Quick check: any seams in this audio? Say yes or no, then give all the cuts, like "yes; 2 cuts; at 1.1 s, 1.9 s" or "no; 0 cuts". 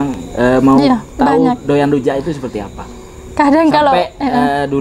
no; 0 cuts